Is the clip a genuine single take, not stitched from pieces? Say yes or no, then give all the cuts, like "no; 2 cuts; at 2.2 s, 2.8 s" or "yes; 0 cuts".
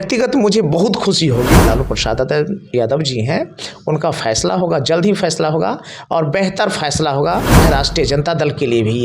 no; 2 cuts; at 1.7 s, 7.6 s